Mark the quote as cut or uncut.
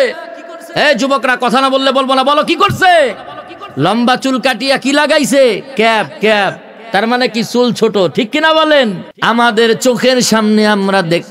cut